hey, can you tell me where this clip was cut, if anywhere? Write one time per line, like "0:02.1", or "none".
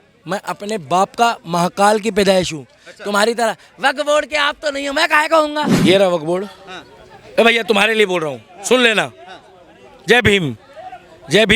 0:05.7